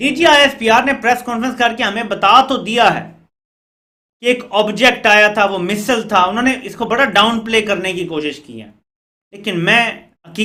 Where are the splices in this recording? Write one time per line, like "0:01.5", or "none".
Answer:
none